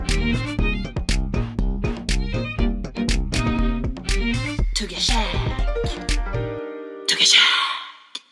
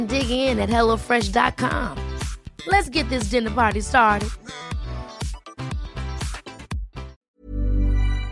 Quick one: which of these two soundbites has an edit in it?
second; 1 cut; at 7.2 s

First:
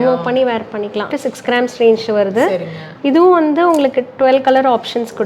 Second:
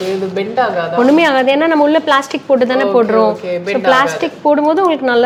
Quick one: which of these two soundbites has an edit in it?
first; 1 cut; at 1.1 s

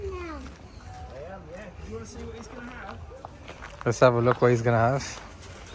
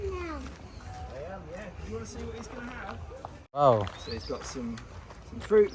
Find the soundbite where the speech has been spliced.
second; 1 cut; at 3.6 s

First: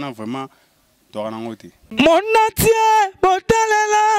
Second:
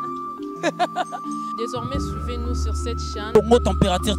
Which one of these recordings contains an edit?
first; 1 cut; at 1.8 s

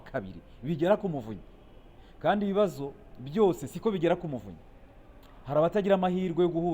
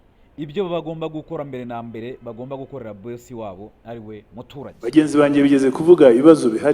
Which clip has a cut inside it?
second; 1 cut; at 4.7 s

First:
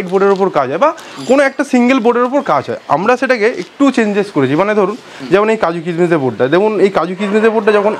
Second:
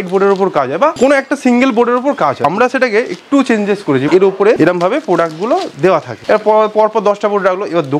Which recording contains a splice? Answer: second; 4 cuts; at 0.9 s, 2.4 s, 4.3 s, 6.1 s

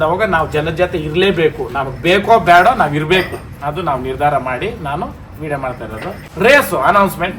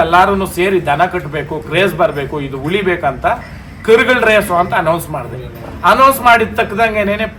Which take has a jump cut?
first; 1 cut; at 6.2 s

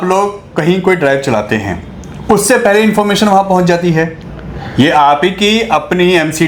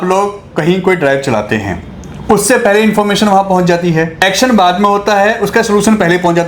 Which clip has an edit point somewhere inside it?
second; 1 cut; at 4.2 s

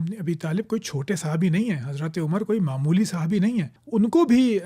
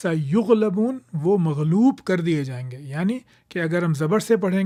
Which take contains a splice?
first; 1 cut; at 3.8 s

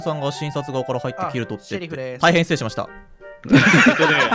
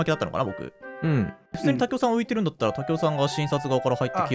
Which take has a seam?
second; 1 cut; at 1.5 s

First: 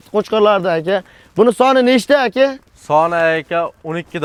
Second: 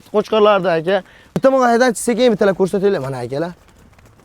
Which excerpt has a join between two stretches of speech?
second; 1 cut; at 1.2 s

